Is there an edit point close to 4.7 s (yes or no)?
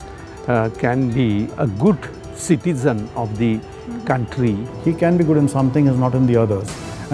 yes